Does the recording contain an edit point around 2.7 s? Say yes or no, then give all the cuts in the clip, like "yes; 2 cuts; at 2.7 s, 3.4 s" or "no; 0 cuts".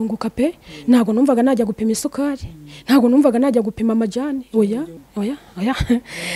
no; 1 cut; at 5.0 s